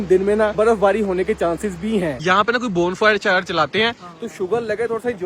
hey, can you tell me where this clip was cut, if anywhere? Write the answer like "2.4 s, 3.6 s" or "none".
2.2 s